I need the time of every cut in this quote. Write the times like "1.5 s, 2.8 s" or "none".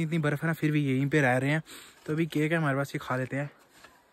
none